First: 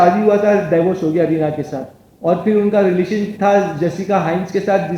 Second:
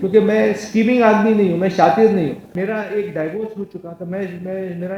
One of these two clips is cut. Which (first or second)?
second